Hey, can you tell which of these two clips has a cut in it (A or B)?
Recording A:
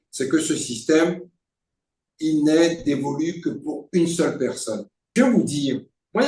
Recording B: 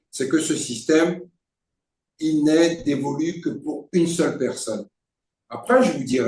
A